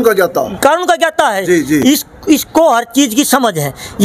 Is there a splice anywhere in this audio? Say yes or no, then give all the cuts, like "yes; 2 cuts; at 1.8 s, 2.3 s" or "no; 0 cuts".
no; 0 cuts